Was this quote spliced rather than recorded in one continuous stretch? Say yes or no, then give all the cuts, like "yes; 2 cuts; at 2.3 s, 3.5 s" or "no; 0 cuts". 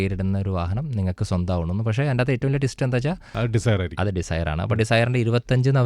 yes; 1 cut; at 3.3 s